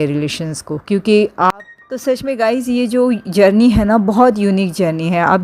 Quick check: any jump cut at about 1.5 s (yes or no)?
yes